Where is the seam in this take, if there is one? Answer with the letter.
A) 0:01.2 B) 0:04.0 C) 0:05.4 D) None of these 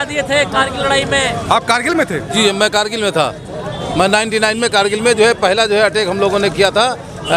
D